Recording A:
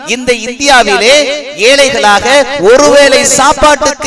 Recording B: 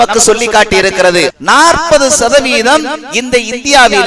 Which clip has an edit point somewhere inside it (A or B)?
B